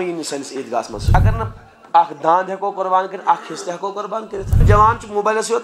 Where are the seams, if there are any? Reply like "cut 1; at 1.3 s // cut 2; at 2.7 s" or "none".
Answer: cut 1; at 1.2 s // cut 2; at 4.6 s